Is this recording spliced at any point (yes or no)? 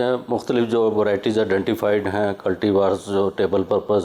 no